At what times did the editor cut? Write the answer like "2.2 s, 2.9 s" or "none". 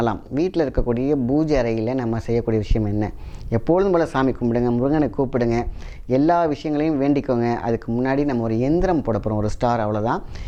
none